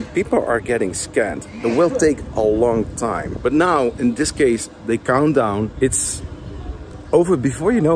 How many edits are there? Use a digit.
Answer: 2